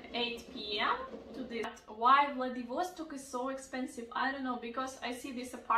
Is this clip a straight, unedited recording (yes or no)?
no